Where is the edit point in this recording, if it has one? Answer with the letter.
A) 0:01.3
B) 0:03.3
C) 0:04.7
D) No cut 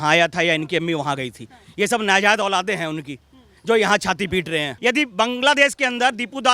C